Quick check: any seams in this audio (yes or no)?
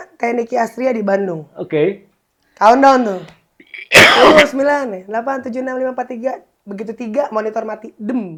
no